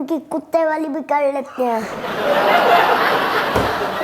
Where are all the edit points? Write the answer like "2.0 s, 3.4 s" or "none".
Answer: none